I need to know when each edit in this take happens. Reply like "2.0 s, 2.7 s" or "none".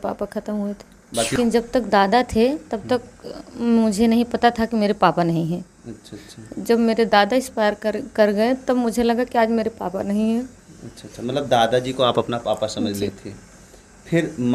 1.3 s